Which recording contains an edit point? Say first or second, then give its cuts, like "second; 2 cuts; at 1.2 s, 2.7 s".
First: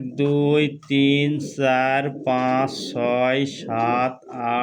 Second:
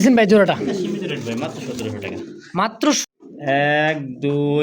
second; 1 cut; at 3.0 s